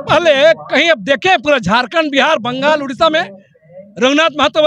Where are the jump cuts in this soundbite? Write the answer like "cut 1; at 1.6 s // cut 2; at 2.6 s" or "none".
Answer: none